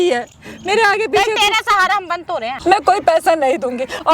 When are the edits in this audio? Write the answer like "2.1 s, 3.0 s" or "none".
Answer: 2.5 s